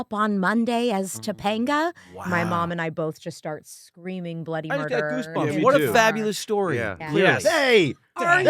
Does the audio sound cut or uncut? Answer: cut